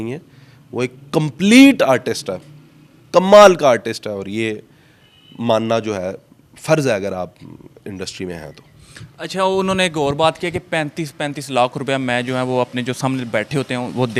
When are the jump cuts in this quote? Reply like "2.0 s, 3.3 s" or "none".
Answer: none